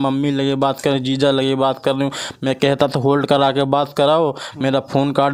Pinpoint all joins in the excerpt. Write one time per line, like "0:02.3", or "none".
none